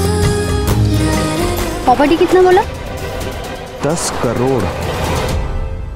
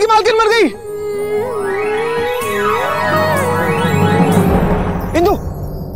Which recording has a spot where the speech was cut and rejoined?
first; 1 cut; at 1.6 s

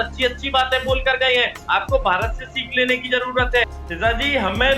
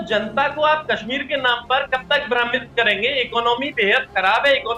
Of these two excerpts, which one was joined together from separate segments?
first; 1 cut; at 3.8 s

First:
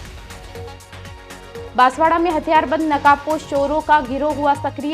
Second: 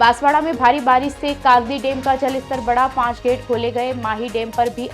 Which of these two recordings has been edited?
first; 1 cut; at 0.9 s

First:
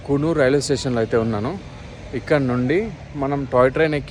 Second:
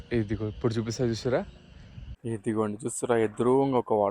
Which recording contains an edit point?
second; 1 cut; at 2.2 s

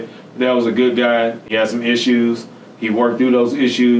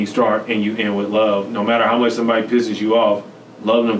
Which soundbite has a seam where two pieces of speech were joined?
first; 1 cut; at 1.4 s

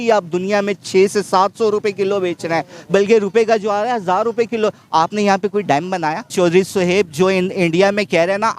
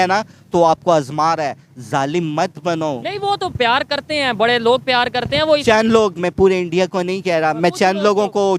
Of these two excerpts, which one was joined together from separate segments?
first; 1 cut; at 6.3 s

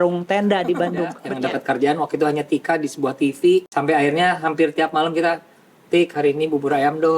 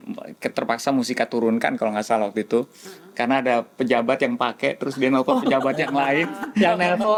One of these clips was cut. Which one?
first; 2 cuts; at 1.2 s, 3.7 s

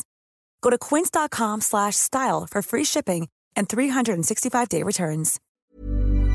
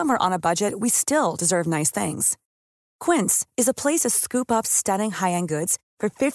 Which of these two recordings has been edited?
first; 1 cut; at 5.4 s

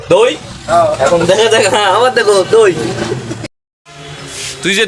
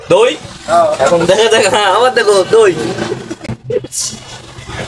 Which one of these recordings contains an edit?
first; 1 cut; at 3.5 s

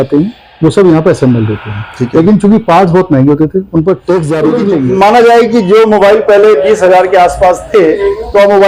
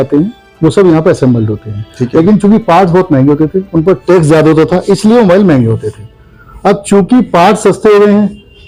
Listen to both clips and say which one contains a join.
first; 1 cut; at 4.3 s

